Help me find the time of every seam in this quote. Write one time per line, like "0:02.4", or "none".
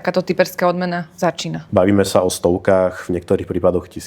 0:01.6